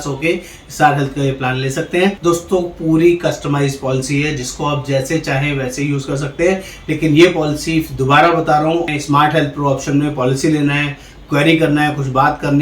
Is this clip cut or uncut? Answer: cut